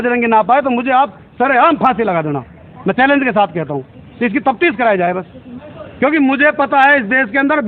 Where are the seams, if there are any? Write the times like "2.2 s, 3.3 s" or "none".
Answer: none